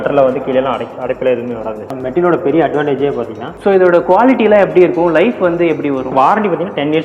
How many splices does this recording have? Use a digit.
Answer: 3